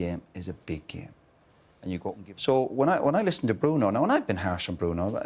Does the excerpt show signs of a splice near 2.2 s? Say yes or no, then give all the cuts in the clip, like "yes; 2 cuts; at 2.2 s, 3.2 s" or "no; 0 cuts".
yes; 1 cut; at 2.2 s